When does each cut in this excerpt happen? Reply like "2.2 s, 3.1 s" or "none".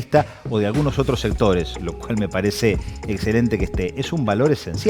none